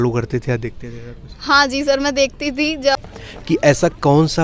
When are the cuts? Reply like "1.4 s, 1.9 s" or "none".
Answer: 3.0 s